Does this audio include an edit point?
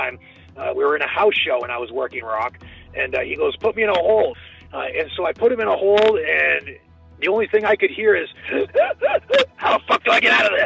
no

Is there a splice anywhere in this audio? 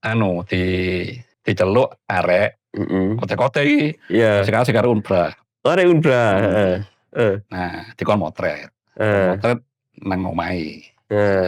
yes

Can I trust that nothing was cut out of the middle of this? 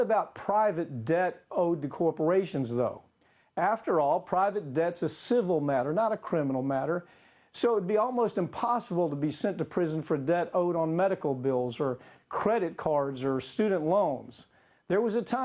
no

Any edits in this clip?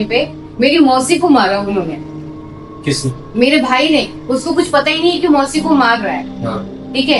no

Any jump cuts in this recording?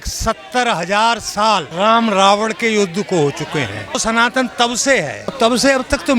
yes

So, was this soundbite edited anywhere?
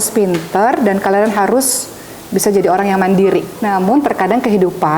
yes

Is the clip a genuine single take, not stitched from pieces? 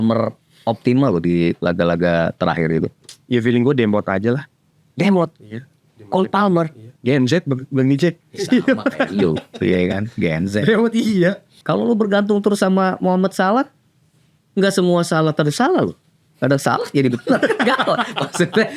no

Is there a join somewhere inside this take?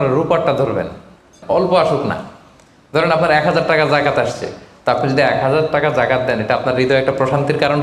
yes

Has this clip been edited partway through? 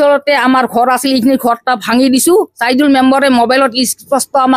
no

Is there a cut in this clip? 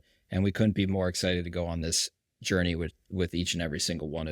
no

